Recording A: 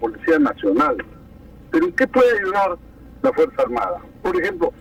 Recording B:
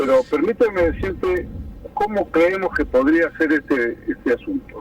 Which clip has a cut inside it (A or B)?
B